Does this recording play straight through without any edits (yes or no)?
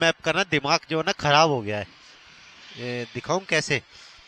yes